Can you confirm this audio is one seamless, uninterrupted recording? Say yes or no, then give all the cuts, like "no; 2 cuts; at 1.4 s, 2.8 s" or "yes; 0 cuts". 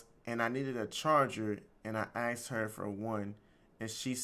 yes; 0 cuts